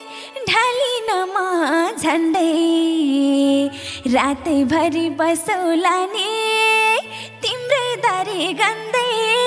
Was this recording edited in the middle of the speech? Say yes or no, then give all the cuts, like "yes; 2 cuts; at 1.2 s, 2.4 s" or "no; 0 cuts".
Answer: no; 0 cuts